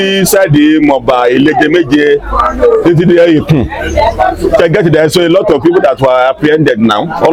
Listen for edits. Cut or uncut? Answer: uncut